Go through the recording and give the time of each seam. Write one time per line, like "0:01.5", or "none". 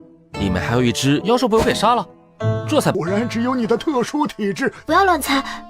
0:01.2
0:02.9